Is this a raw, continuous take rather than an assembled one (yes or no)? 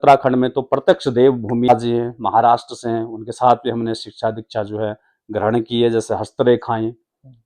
no